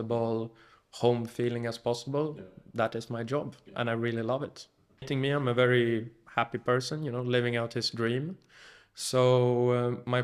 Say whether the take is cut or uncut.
cut